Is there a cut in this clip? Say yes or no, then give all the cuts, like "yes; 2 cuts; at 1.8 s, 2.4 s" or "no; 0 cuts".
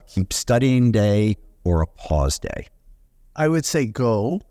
no; 0 cuts